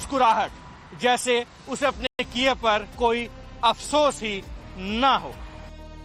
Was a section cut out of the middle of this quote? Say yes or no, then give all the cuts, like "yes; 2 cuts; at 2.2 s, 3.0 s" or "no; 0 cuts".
no; 0 cuts